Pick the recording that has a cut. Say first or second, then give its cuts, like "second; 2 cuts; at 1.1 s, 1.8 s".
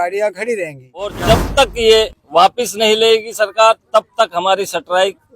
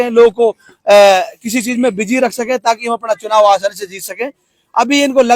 first; 1 cut; at 1.2 s